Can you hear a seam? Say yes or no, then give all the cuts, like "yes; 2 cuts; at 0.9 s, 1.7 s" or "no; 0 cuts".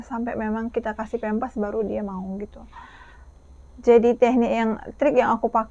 no; 0 cuts